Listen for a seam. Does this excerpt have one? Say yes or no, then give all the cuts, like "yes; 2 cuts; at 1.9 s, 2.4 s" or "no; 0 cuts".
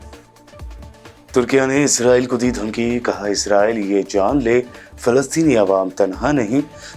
yes; 1 cut; at 1.1 s